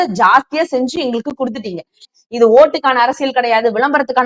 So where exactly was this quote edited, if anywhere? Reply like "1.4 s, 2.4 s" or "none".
2.1 s